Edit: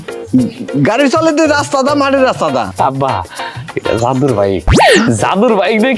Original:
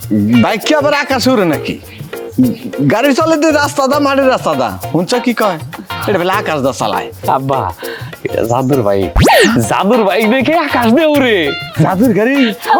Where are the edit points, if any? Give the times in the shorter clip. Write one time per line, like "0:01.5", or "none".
0:02.7